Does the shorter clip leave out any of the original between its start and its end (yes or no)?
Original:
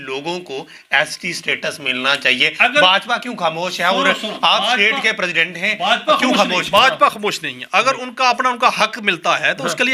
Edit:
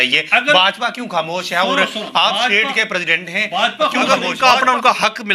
yes